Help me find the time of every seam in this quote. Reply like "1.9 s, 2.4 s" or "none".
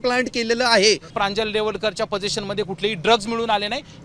1.1 s